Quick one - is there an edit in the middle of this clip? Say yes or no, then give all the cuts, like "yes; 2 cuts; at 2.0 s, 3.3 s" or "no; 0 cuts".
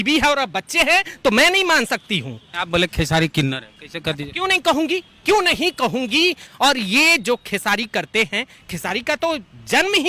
yes; 2 cuts; at 2.6 s, 6.4 s